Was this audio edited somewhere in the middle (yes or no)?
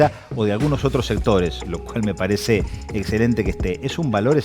no